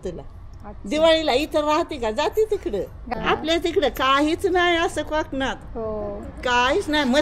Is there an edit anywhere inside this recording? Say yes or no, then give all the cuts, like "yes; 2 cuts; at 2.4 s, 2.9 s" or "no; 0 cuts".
yes; 1 cut; at 3.1 s